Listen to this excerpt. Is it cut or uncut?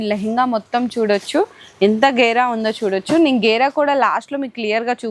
uncut